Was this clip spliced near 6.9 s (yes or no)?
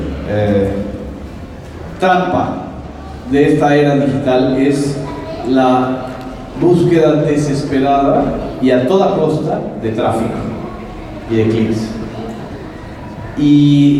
yes